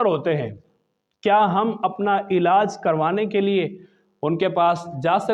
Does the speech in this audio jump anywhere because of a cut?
no; 0 cuts

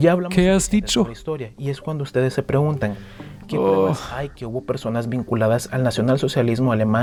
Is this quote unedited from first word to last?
yes; 0 cuts

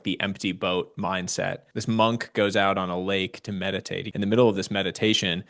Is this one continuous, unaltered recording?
no; 2 cuts; at 1.7 s, 4.0 s

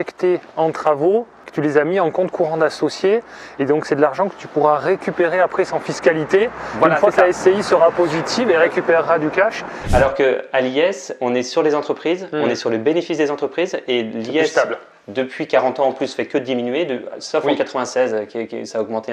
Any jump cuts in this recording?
yes; 2 cuts; at 1.4 s, 9.8 s

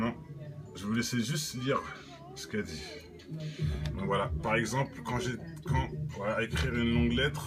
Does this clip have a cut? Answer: no; 0 cuts

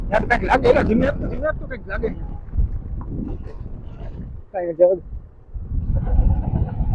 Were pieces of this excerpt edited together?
no; 0 cuts

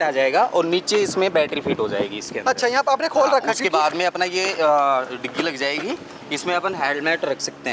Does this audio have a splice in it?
no; 0 cuts

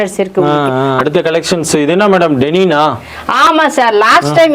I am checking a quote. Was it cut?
yes; 1 cut; at 1.0 s

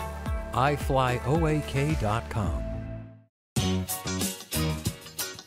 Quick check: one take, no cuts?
no; 1 cut; at 3.4 s

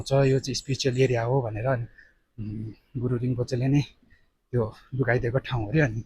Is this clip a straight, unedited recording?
yes; 0 cuts

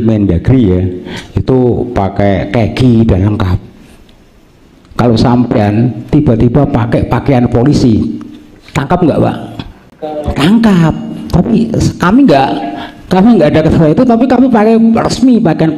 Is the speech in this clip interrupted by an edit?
no; 0 cuts

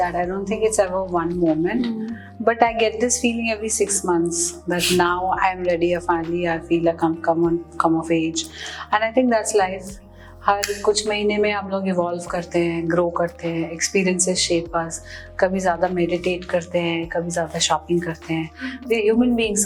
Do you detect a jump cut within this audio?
no; 0 cuts

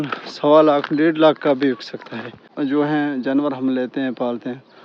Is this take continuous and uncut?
no; 1 cut; at 2.4 s

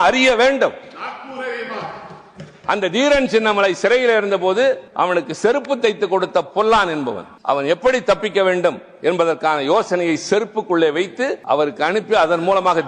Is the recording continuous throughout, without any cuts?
no; 3 cuts; at 4.9 s, 7.3 s, 11.4 s

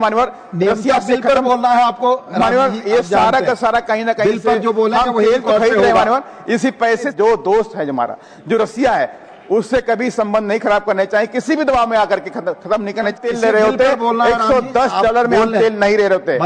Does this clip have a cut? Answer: yes; 2 cuts; at 7.1 s, 13.1 s

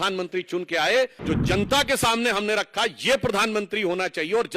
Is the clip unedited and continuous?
no; 1 cut; at 1.2 s

